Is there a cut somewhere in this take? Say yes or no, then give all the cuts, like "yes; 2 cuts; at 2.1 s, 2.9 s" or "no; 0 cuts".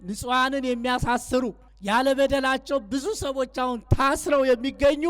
yes; 1 cut; at 1.7 s